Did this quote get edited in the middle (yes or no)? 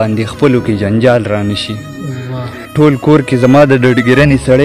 yes